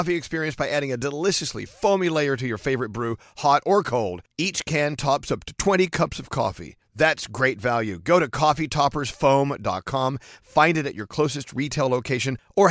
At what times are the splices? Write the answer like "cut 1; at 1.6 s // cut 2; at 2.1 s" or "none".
none